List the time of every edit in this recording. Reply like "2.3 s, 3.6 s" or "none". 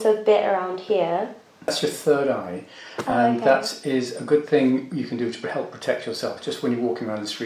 1.7 s